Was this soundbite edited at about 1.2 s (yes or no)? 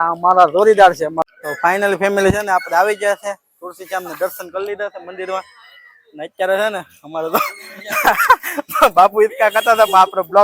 yes